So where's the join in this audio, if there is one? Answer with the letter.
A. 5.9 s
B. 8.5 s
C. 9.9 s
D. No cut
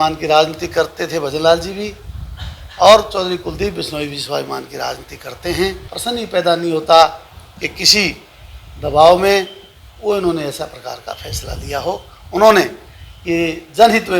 A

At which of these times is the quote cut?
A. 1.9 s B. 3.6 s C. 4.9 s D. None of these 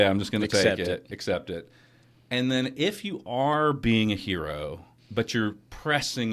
C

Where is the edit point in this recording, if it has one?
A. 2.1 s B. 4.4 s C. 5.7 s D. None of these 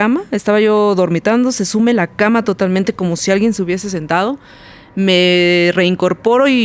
D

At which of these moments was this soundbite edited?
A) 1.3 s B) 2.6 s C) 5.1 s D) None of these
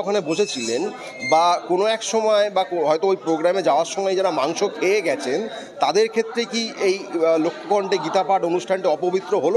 D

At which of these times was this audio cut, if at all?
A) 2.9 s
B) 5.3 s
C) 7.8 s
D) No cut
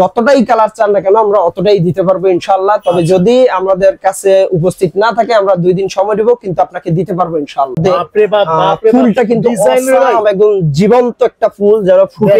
C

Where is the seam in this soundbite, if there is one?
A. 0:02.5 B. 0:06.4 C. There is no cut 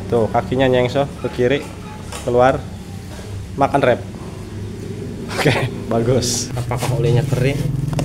B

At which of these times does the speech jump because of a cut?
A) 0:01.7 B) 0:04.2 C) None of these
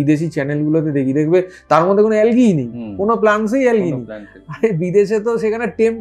C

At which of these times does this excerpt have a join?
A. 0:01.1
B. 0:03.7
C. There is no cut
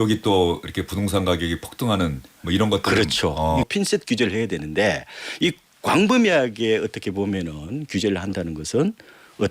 B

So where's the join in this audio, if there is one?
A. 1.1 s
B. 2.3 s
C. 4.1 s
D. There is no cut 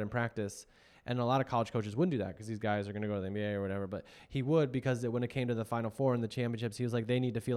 D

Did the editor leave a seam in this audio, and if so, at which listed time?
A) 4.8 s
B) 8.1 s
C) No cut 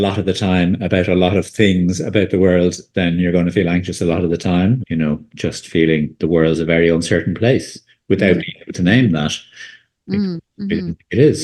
A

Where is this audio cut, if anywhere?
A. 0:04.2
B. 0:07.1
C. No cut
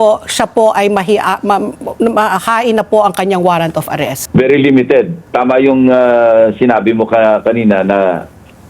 A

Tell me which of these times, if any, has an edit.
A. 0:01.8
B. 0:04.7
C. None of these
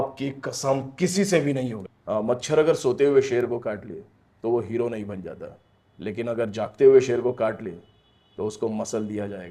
A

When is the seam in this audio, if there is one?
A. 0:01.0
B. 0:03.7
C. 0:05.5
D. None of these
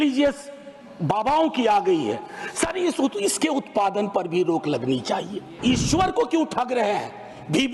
C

